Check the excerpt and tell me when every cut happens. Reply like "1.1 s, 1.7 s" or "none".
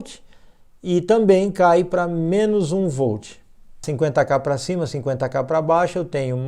3.8 s

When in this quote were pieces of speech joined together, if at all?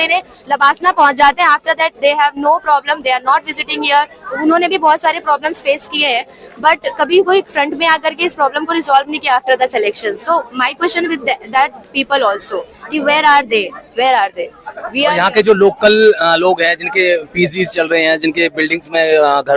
none

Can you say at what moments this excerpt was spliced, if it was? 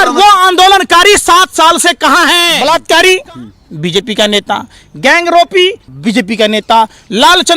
2.5 s, 5.9 s

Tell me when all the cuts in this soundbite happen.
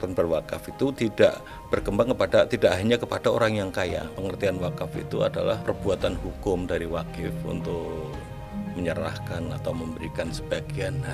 4.1 s, 5.6 s

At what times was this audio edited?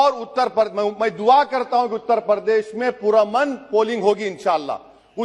none

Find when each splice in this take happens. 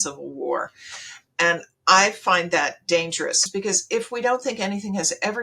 3.4 s

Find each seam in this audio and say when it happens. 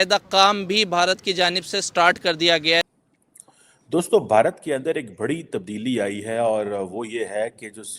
2.9 s

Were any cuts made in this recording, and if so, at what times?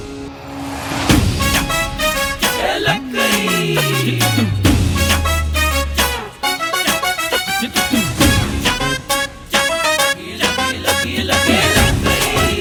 none

